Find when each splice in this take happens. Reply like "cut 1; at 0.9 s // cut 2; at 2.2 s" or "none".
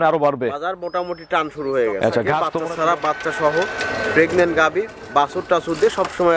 cut 1; at 2.5 s